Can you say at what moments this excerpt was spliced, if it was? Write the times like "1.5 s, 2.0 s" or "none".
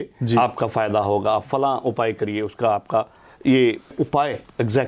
3.9 s